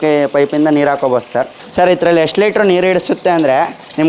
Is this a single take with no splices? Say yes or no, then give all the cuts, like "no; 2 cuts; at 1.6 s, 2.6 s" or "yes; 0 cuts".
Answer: yes; 0 cuts